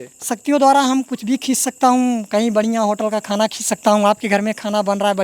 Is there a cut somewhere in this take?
no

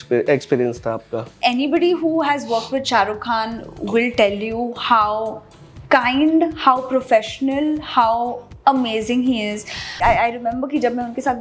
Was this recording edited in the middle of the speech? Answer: yes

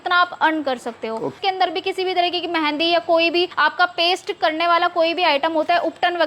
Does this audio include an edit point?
yes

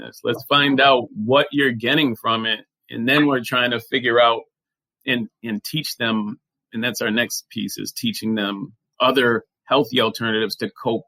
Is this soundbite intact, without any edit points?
no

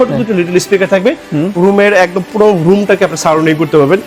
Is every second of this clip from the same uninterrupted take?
yes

